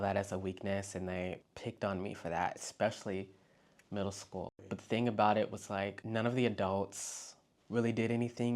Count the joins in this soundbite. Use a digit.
3